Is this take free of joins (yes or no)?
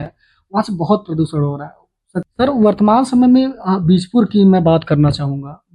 no